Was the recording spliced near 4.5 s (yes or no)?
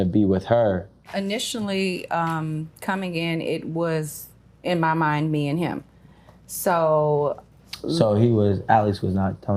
no